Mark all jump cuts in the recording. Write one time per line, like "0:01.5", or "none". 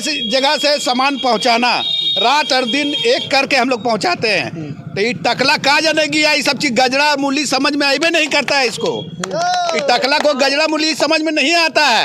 none